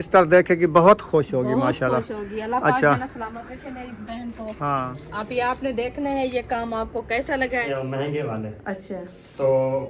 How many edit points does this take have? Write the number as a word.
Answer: one